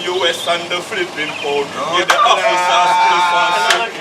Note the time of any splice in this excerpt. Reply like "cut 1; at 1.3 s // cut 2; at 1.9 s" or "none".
none